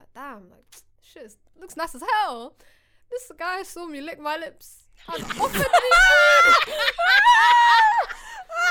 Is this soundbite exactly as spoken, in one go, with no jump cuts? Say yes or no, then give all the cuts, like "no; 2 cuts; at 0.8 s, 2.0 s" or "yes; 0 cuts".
yes; 0 cuts